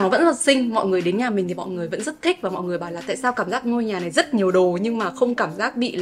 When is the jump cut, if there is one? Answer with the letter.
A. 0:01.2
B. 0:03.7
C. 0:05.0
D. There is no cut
D